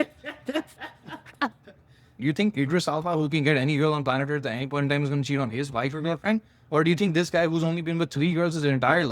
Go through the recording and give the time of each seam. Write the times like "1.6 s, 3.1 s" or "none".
2.2 s